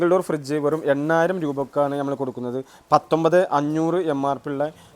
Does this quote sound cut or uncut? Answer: uncut